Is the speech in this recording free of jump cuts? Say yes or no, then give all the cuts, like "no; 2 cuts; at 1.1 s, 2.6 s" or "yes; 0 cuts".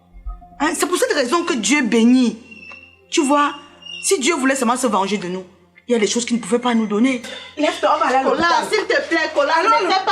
no; 1 cut; at 7.4 s